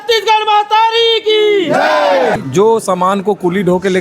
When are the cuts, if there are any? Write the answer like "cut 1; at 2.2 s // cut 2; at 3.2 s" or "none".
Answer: cut 1; at 2.4 s